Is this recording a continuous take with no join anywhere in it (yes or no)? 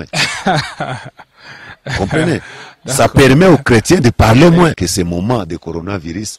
no